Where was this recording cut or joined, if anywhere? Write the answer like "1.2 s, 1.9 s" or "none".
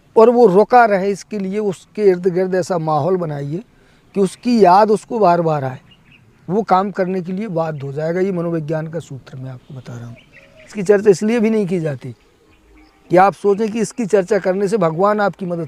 10.8 s